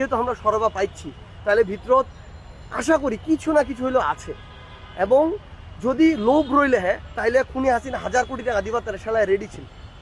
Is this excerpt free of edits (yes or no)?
yes